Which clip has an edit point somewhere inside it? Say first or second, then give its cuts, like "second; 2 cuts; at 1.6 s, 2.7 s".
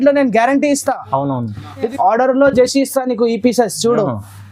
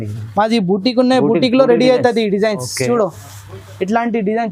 first; 1 cut; at 1.9 s